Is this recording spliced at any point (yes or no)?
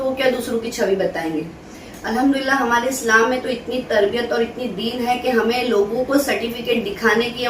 no